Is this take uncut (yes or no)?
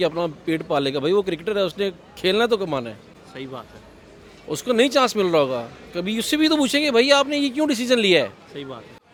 yes